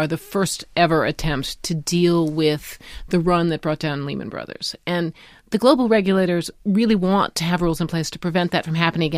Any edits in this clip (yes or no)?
no